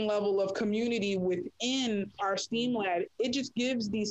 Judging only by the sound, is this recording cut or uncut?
cut